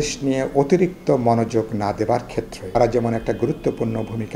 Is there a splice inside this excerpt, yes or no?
yes